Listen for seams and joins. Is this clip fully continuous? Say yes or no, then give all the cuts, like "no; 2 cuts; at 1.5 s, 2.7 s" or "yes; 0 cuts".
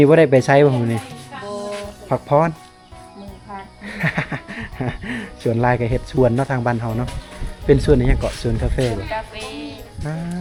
yes; 0 cuts